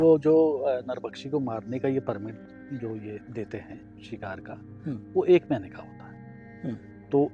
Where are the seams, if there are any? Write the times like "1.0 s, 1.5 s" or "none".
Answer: none